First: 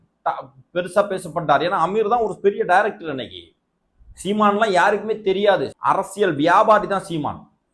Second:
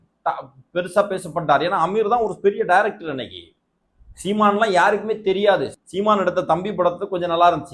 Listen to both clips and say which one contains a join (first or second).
first